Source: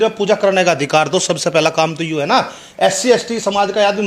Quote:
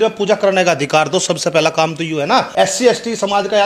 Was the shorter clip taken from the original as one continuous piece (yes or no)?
no